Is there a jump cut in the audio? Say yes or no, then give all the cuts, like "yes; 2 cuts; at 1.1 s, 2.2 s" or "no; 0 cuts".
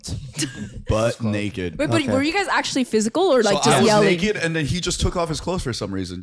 no; 0 cuts